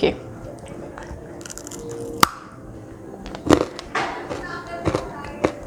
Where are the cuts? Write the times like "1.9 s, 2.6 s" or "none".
none